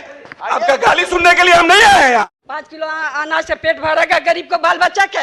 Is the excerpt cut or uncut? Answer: cut